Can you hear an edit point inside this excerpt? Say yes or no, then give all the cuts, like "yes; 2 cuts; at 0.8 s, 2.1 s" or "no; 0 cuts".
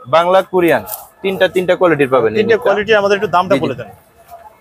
no; 0 cuts